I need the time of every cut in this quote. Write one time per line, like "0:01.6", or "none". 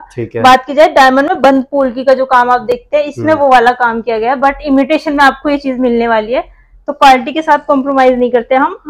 none

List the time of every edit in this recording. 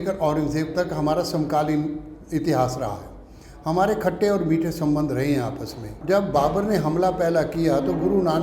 0:05.9

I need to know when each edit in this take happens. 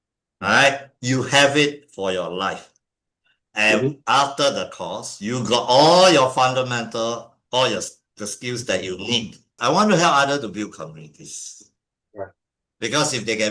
0:09.5

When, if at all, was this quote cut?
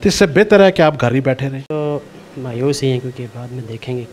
0:01.8

